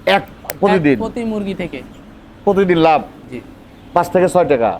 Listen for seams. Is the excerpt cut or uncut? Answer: uncut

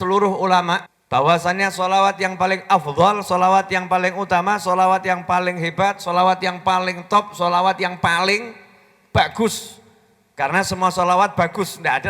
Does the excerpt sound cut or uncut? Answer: cut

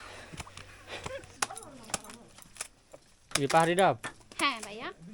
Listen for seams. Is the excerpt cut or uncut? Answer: cut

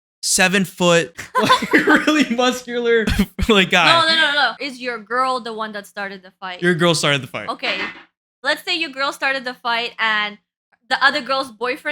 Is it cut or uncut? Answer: cut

